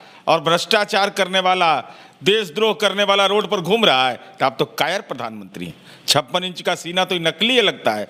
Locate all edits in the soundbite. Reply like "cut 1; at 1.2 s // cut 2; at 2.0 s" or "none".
none